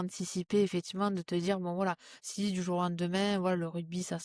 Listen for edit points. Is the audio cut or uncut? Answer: uncut